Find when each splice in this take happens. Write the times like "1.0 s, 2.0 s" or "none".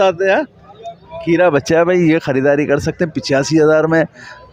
none